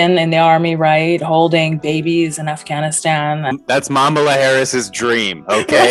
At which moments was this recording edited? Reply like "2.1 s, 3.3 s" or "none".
none